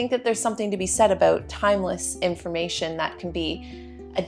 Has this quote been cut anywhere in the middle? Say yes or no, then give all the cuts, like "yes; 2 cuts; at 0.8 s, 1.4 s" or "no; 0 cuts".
no; 0 cuts